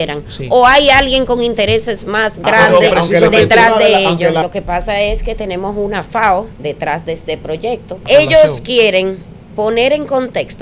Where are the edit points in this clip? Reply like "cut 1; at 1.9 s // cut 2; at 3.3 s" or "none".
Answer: cut 1; at 4.5 s // cut 2; at 6.5 s // cut 3; at 8.0 s